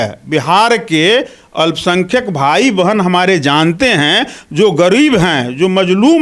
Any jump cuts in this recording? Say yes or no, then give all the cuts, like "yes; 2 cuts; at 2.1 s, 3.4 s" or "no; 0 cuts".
no; 0 cuts